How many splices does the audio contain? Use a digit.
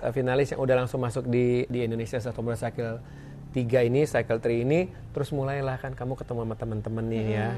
1